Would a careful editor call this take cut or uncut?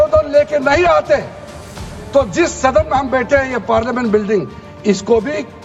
uncut